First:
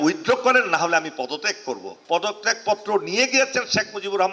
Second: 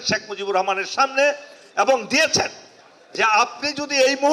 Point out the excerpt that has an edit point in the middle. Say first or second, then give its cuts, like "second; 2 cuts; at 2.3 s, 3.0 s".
first; 1 cut; at 1.9 s